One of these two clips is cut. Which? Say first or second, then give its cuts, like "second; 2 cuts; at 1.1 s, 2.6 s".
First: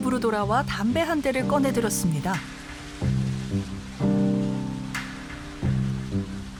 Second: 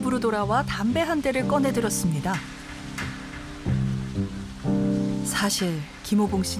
second; 1 cut; at 2.9 s